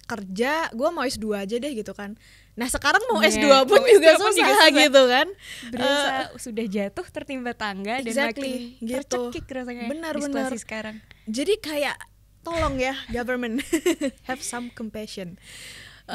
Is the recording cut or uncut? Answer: uncut